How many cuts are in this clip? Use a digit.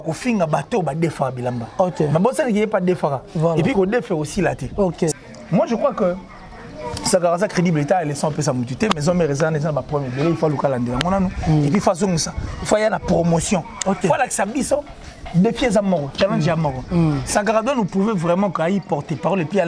1